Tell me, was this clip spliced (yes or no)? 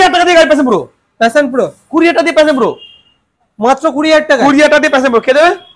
no